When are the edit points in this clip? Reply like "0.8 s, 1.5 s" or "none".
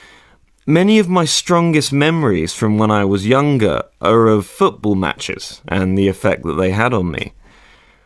3.9 s